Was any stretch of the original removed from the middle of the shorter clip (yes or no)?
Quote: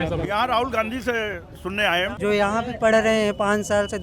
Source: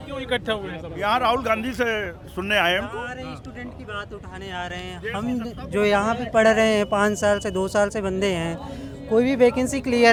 yes